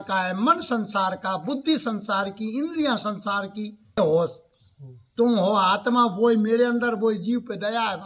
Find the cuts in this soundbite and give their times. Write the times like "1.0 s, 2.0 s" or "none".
4.0 s

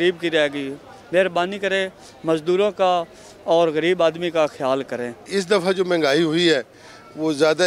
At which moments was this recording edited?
5.2 s

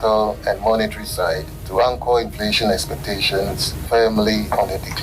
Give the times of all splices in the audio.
1.5 s, 3.7 s

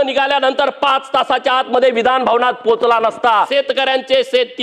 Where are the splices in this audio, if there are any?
3.5 s

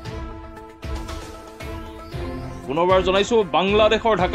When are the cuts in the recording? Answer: none

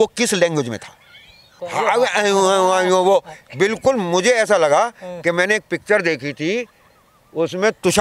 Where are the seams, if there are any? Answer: 1.6 s

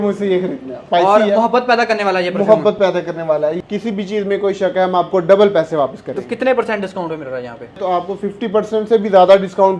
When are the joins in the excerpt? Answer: 0.8 s, 3.6 s, 7.8 s

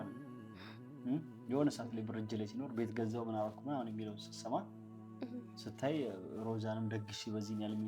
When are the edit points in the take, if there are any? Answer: none

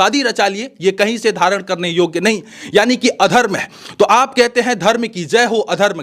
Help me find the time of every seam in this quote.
none

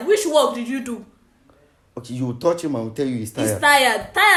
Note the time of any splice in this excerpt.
none

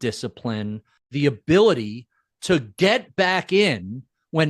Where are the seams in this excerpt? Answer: 1.0 s

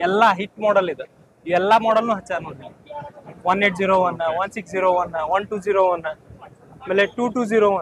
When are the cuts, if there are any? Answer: none

